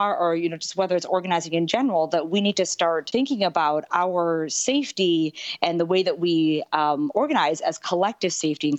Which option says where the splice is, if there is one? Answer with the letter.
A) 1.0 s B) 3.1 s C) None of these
B